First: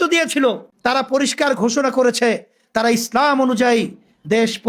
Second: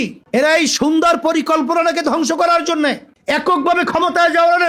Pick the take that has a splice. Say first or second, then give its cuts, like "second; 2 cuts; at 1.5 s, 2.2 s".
second; 1 cut; at 3.1 s